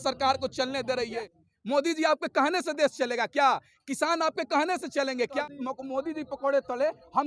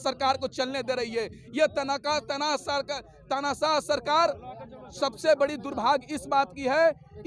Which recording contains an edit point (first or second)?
first